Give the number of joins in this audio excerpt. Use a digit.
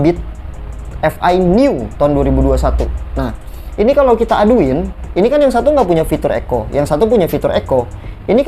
0